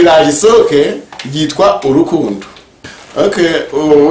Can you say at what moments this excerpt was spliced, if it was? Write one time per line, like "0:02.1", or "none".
0:02.9